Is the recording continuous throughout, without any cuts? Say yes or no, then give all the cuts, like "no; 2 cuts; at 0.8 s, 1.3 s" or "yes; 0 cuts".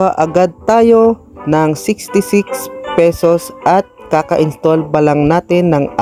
yes; 0 cuts